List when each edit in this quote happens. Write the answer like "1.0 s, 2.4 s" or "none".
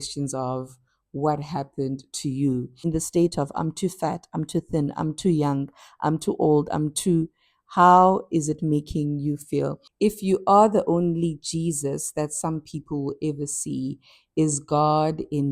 2.7 s, 9.8 s